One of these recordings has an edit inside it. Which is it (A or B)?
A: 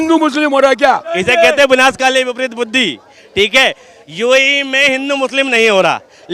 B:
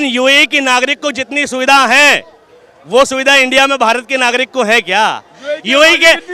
A